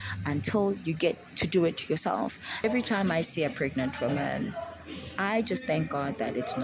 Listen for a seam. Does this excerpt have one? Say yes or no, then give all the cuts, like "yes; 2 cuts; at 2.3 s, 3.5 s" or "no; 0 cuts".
yes; 1 cut; at 2.6 s